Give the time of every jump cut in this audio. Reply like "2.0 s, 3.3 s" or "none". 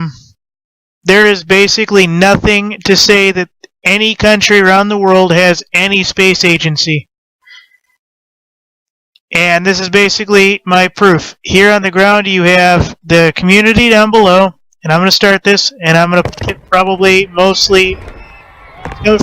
none